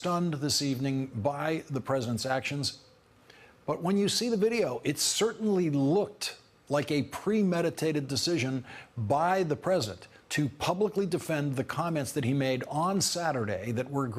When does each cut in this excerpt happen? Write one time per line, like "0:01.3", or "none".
0:09.9